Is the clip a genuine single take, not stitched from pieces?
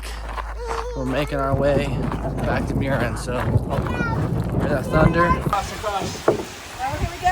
yes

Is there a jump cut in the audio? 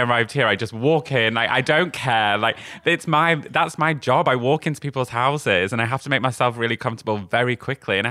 no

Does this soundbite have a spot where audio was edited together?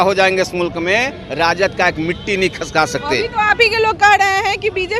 no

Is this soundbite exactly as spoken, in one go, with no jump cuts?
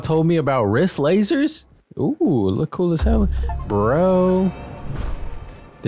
no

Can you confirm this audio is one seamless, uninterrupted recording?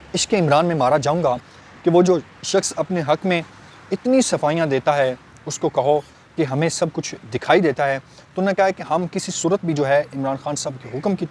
no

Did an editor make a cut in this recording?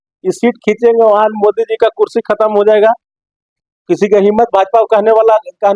no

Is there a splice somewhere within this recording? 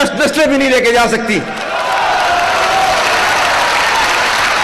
no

